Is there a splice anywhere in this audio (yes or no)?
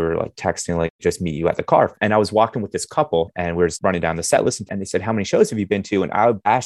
yes